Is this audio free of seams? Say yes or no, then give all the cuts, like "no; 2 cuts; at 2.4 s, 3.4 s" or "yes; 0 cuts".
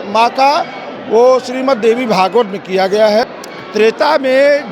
no; 1 cut; at 3.2 s